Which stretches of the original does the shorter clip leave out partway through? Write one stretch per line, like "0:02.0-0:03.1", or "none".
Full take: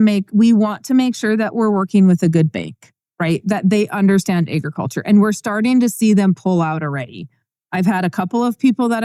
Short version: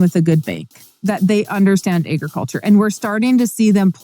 0:03.1-0:03.4

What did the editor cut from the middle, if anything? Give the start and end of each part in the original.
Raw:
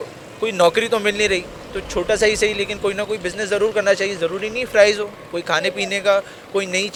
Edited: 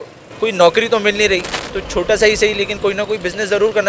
none

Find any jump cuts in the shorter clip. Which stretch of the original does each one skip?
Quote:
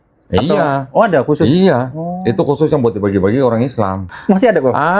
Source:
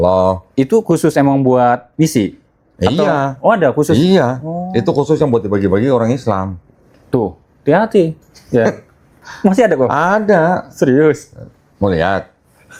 0:06.5-0:09.2

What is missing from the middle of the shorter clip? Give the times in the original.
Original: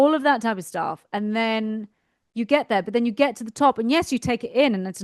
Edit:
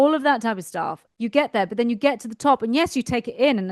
0:01.0-0:02.2

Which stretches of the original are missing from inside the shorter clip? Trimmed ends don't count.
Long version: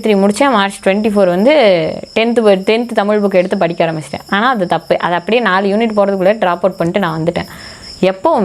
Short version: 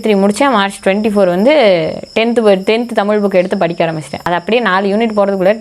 0:04.2-0:05.0

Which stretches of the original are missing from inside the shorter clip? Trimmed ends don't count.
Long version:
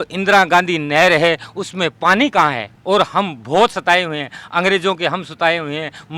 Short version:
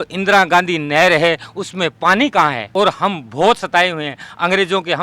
0:02.6-0:02.8

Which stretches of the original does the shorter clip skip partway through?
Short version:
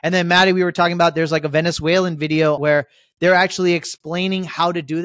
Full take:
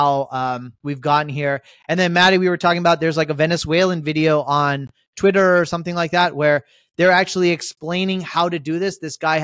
0:04.4-0:06.4

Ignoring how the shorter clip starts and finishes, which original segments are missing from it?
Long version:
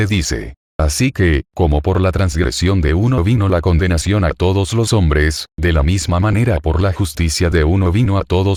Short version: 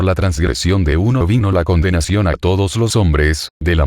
none

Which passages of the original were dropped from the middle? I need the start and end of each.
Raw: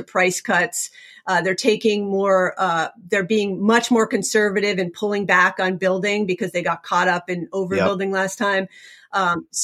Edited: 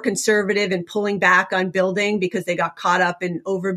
none

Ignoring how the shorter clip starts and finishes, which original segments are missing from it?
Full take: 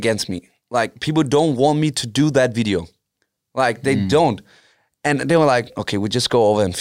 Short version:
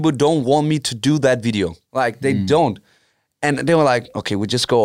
0:02.9-0:03.4

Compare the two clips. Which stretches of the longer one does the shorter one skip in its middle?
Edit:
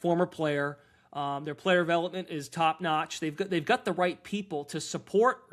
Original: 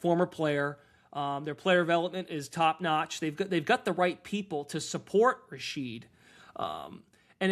none

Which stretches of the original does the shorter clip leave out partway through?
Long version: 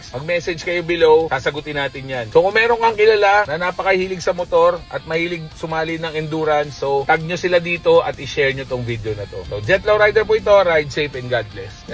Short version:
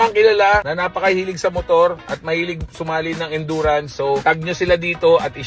none

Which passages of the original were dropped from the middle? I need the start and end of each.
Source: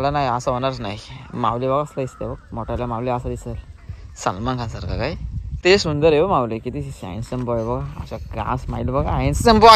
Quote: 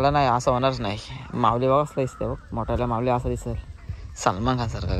none

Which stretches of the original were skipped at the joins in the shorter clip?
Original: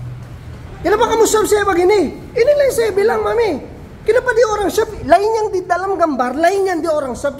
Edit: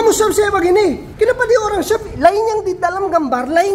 0:02.2-0:03.9

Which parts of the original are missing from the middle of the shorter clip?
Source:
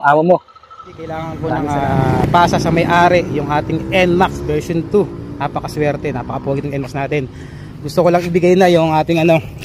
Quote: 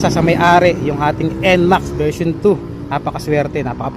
none

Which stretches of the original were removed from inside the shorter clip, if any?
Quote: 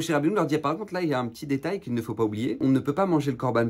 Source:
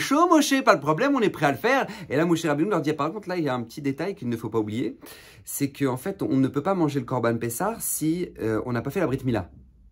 0:04.9-0:06.3

